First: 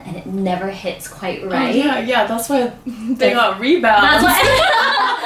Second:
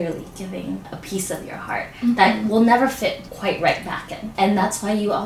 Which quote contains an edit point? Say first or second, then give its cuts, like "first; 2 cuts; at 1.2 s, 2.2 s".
second; 3 cuts; at 0.9 s, 3.3 s, 4.3 s